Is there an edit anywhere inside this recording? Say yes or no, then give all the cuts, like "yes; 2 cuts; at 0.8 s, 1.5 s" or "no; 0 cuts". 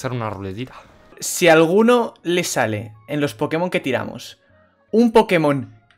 yes; 1 cut; at 1.1 s